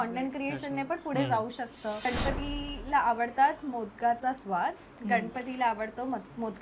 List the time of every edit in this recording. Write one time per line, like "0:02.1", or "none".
0:02.1